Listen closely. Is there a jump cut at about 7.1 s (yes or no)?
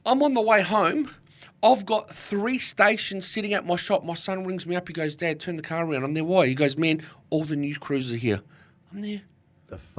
no